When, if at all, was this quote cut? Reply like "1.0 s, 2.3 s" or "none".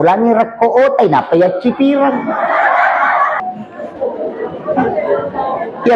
3.4 s